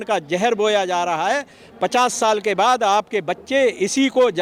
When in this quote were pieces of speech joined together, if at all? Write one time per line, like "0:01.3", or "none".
none